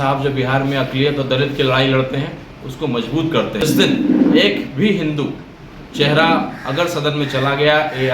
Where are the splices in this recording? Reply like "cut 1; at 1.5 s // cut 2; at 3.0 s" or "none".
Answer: cut 1; at 3.6 s